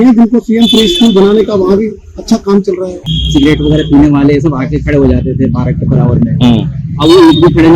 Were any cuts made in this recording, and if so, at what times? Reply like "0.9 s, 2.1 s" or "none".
2.9 s